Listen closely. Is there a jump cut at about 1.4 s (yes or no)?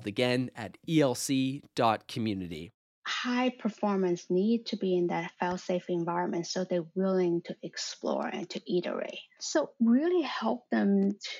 no